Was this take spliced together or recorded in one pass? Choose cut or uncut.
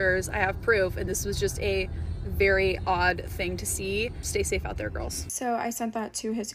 cut